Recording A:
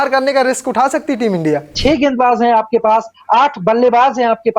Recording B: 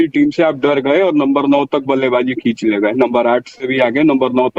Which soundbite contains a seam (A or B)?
A